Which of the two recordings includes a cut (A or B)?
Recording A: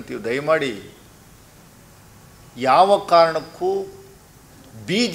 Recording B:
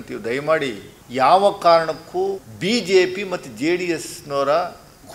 B